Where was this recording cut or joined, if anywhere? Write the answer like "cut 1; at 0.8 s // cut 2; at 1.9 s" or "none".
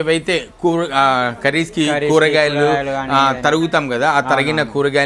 none